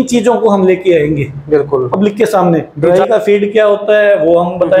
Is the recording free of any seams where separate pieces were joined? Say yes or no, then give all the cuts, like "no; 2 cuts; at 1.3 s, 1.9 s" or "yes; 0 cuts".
no; 1 cut; at 2.7 s